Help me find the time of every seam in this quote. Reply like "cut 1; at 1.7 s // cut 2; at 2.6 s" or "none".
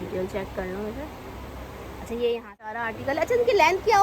cut 1; at 2.9 s